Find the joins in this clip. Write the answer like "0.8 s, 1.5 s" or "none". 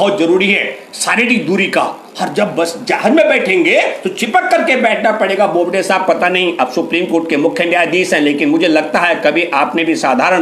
none